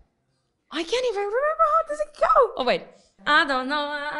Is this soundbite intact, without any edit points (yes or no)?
no